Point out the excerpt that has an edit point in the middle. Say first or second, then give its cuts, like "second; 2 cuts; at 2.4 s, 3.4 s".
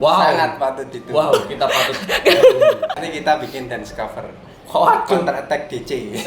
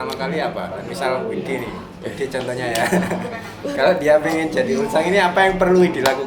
first; 1 cut; at 3.1 s